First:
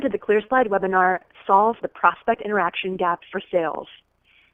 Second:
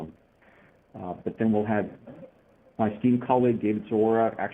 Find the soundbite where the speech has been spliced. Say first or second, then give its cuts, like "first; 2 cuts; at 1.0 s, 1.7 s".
second; 1 cut; at 3.1 s